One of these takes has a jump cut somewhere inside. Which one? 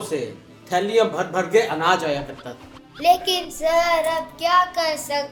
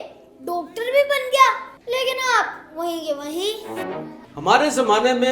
second; 2 cuts; at 1.7 s, 4.2 s

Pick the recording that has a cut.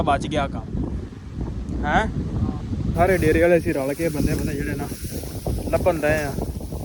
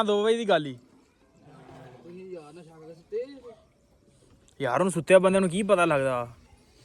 first; 1 cut; at 3.0 s

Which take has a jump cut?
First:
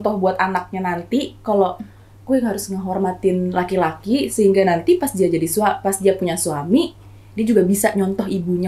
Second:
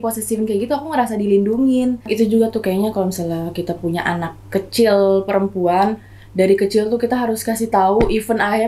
second; 1 cut; at 2.0 s

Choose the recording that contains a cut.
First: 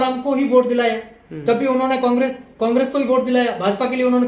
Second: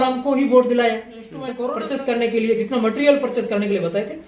second; 1 cut; at 1.3 s

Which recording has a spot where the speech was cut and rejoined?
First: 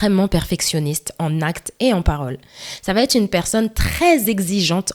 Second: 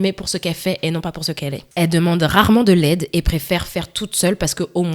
second; 1 cut; at 1.6 s

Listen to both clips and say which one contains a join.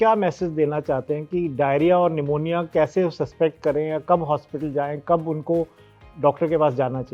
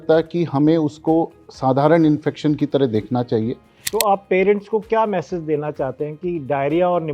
second; 1 cut; at 3.7 s

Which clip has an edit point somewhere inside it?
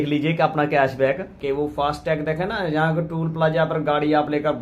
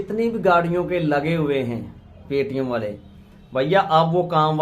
first; 1 cut; at 1.4 s

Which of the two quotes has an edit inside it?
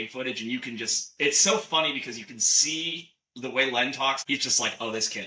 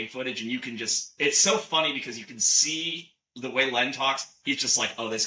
first; 1 cut; at 4.2 s

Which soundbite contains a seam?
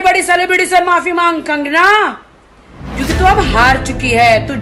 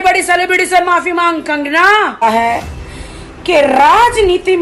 second; 1 cut; at 2.2 s

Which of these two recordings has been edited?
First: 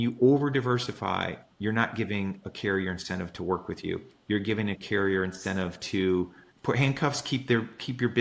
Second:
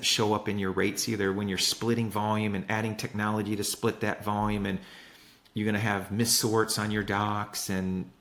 first; 2 cuts; at 1.5 s, 6.4 s

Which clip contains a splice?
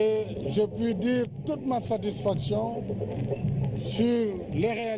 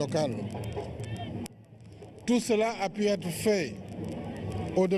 first; 1 cut; at 1.8 s

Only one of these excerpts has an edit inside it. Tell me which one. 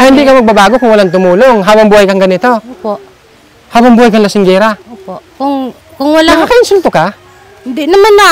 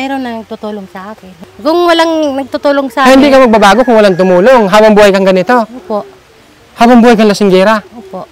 second; 1 cut; at 1.3 s

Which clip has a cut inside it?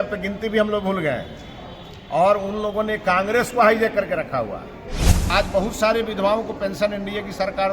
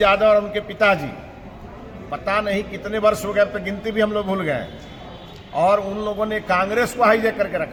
first; 1 cut; at 5.3 s

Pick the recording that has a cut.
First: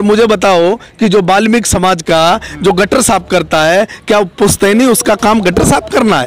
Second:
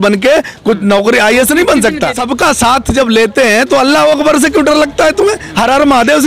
second; 1 cut; at 2.2 s

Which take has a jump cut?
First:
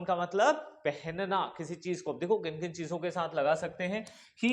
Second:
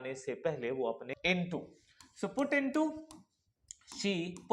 second; 1 cut; at 1.1 s

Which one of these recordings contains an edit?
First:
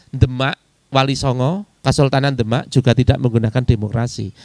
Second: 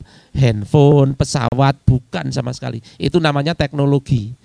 first; 1 cut; at 1.7 s

